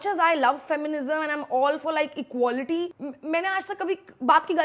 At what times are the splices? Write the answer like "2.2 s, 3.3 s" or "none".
3.0 s